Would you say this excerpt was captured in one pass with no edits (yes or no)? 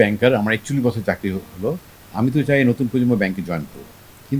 yes